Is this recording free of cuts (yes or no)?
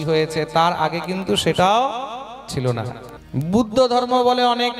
no